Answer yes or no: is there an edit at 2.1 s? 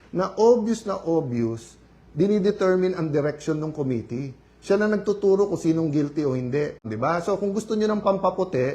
no